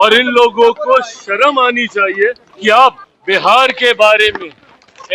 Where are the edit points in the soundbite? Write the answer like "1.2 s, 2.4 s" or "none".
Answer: 2.5 s, 3.1 s

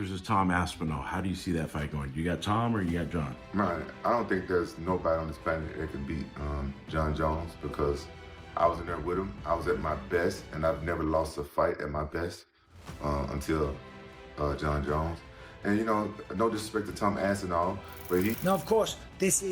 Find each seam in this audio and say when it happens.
18.4 s

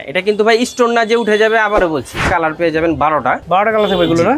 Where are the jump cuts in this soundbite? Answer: 2.3 s, 3.4 s

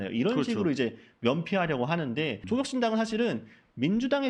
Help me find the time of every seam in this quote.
2.4 s

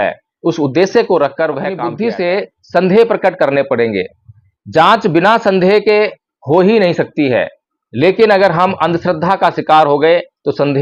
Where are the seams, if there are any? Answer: 1.9 s

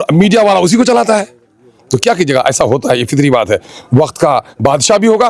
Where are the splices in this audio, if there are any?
none

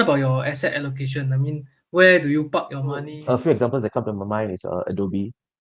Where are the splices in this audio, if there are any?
3.1 s

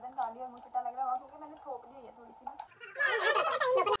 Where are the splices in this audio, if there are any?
2.8 s

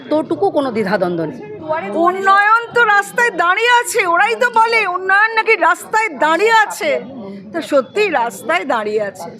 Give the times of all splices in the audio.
1.5 s

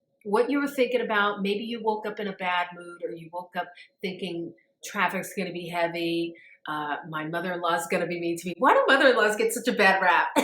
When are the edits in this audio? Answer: 4.7 s

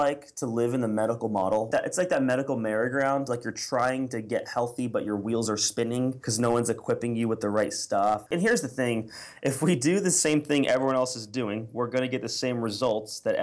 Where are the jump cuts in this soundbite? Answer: 1.7 s, 6.2 s, 8.2 s

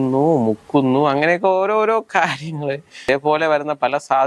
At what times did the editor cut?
3.1 s

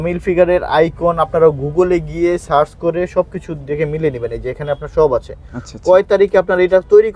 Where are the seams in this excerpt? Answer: none

